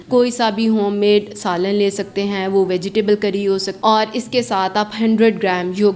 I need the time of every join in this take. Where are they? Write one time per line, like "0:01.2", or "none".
0:03.7